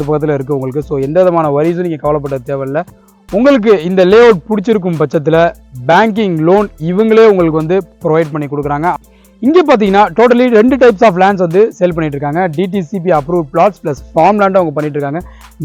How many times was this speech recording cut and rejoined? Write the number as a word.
two